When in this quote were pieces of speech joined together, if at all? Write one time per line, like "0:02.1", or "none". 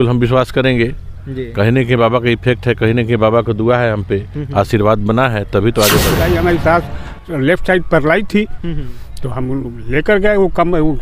0:06.1